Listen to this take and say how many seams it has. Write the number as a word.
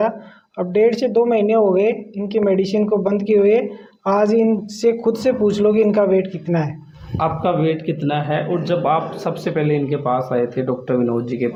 zero